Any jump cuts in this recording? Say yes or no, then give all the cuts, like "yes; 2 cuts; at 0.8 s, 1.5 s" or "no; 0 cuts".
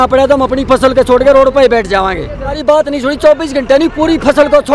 yes; 1 cut; at 2.5 s